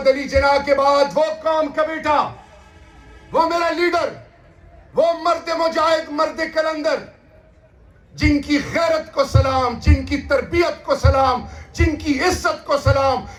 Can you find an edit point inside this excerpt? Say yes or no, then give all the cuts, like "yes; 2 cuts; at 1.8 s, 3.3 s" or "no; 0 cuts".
no; 0 cuts